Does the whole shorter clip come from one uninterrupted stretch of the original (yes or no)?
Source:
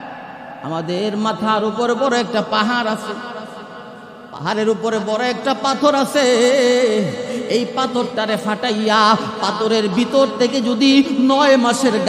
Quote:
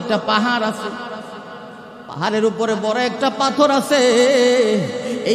yes